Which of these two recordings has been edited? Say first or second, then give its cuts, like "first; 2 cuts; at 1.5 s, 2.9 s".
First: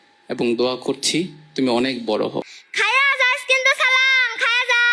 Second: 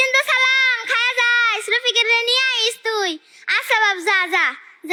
first; 1 cut; at 2.6 s